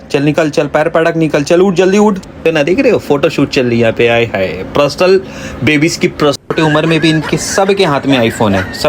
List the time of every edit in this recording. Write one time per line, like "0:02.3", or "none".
0:02.4
0:06.5